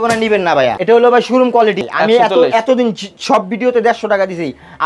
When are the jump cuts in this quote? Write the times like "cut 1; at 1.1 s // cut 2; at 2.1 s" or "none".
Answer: cut 1; at 0.8 s // cut 2; at 1.8 s

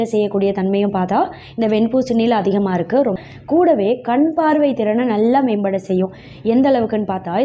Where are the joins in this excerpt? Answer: cut 1; at 3.2 s

